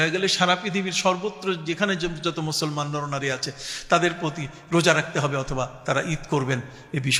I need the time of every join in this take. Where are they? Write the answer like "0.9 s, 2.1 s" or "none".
none